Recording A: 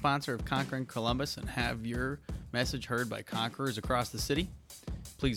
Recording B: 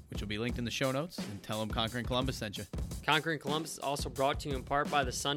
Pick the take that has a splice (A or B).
B